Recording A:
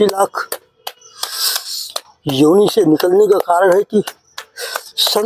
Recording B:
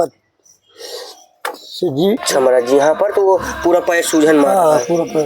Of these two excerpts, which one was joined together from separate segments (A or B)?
B